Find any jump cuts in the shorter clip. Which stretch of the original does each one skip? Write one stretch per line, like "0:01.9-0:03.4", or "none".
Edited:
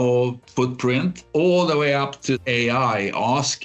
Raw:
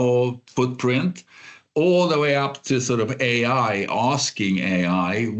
0:01.2-0:01.6
0:02.8-0:03.2